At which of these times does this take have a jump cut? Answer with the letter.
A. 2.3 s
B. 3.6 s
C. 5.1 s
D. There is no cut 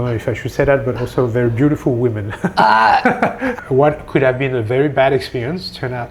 B